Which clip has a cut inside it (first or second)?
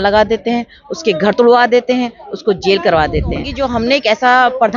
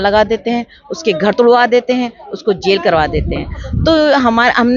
first